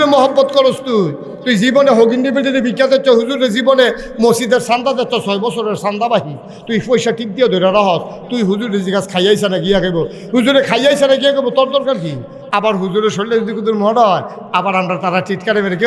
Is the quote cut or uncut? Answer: uncut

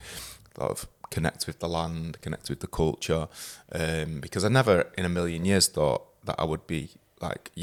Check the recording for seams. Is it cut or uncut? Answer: uncut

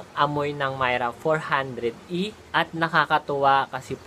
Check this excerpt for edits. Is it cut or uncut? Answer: cut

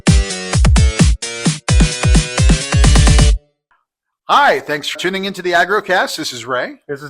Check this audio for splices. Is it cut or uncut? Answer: cut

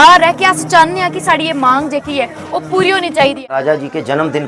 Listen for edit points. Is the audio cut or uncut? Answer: cut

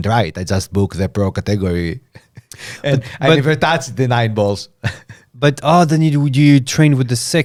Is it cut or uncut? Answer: uncut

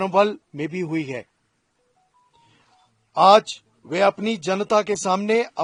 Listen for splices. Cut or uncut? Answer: uncut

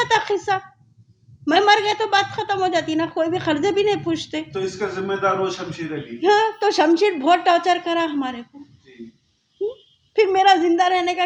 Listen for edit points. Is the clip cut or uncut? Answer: uncut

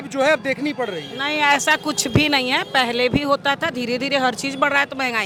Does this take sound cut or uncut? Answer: uncut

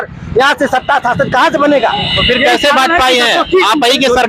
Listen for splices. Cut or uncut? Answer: uncut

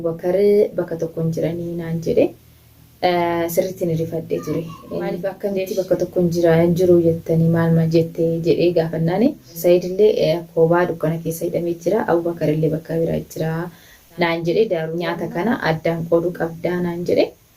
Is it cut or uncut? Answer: cut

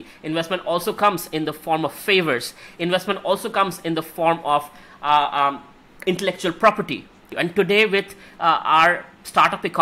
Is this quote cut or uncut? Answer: uncut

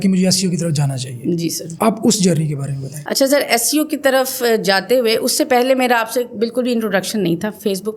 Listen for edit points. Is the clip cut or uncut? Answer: uncut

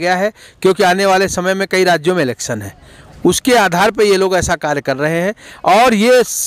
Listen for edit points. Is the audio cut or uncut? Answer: uncut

